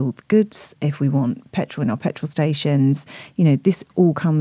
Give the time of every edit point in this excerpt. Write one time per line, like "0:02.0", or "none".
none